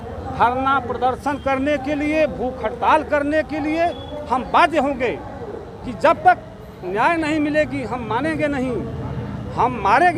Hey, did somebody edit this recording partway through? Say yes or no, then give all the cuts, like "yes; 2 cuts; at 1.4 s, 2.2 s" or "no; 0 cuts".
no; 0 cuts